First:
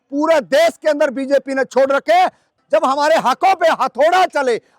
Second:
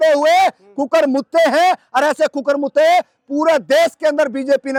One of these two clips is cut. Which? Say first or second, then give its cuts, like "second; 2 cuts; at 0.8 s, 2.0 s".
first; 1 cut; at 2.5 s